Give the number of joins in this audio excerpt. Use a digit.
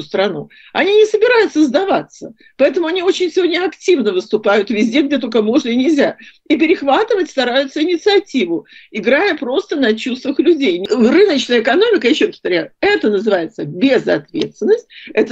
1